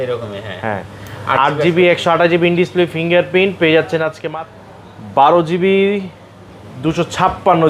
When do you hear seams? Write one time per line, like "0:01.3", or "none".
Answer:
0:04.2